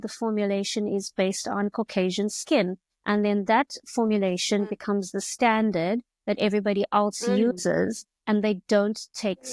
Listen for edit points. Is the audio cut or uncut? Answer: uncut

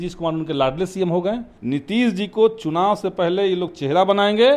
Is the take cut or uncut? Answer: cut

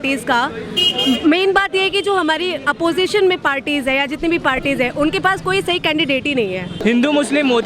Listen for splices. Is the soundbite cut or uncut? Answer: cut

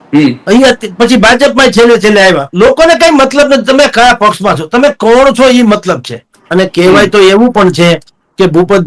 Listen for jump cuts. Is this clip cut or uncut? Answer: cut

